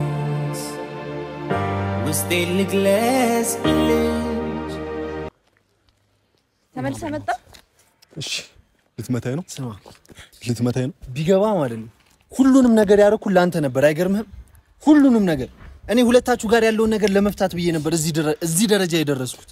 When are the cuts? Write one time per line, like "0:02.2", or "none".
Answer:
0:05.3

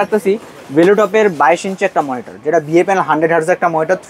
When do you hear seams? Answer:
none

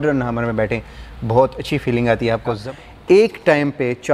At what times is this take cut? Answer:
0:02.6

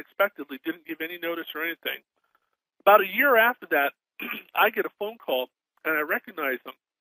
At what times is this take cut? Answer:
none

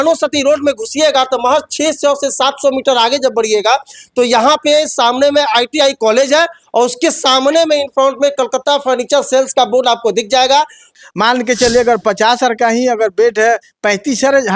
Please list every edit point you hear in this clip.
0:10.8

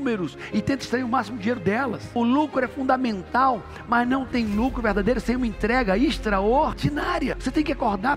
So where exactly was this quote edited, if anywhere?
0:02.0

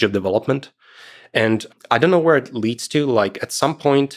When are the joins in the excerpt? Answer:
0:01.7

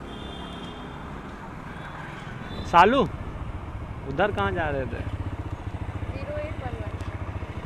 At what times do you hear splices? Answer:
none

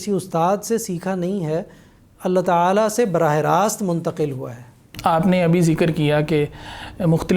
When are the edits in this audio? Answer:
none

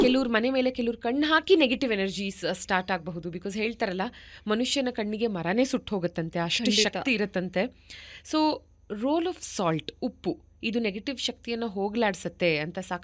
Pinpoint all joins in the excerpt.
none

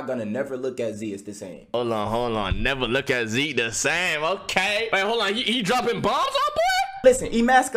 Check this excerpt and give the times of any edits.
0:01.7
0:04.9
0:07.0

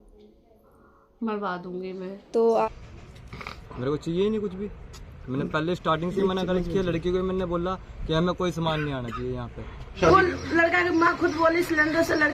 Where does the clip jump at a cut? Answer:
0:02.7
0:10.0

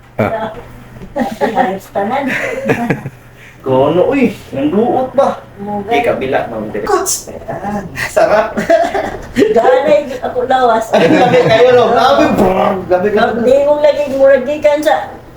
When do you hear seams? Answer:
0:06.8

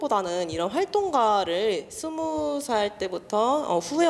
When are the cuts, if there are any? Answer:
none

